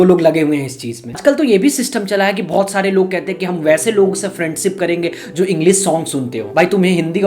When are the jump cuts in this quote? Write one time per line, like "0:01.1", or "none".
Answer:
0:01.1